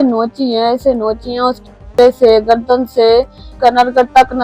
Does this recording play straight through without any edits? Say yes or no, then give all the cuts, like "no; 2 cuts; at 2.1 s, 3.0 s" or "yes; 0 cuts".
no; 1 cut; at 3.5 s